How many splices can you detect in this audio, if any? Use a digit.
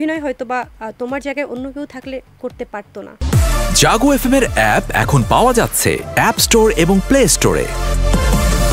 1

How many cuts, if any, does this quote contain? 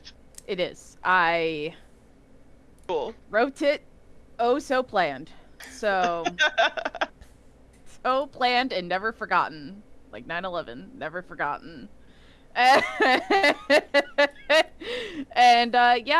0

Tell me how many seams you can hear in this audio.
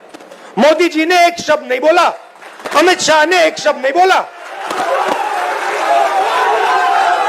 0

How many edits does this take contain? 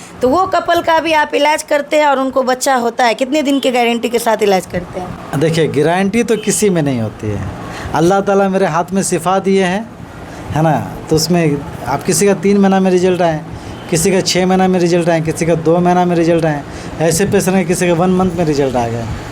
0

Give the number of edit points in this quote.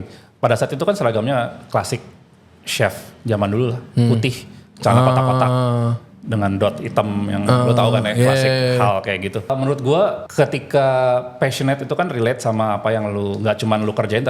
2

